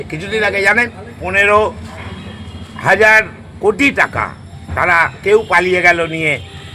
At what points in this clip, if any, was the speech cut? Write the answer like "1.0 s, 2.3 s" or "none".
1.1 s